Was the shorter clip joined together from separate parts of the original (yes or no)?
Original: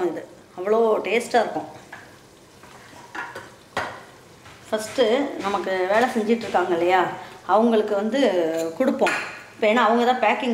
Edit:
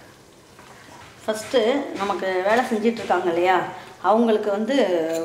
yes